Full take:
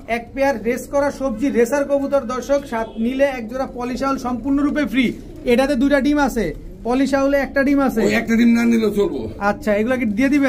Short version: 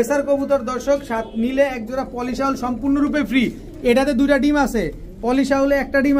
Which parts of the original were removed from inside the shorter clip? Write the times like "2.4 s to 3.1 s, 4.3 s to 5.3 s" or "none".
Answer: none